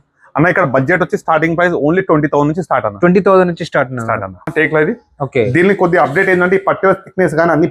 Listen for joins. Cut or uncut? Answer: cut